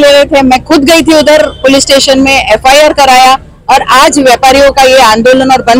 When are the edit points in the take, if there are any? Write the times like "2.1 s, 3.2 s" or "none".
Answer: none